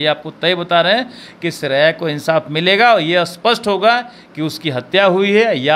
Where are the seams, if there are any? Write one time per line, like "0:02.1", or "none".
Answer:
none